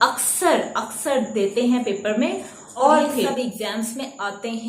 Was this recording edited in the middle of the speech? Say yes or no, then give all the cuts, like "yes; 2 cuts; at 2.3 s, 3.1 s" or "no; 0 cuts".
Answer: yes; 1 cut; at 3.3 s